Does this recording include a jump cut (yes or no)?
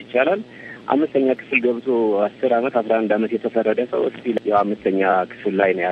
yes